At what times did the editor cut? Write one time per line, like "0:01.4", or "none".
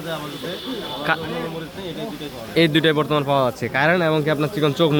none